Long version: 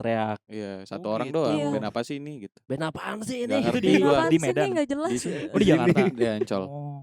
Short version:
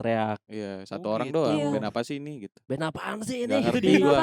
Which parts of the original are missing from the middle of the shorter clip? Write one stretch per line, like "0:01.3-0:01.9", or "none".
none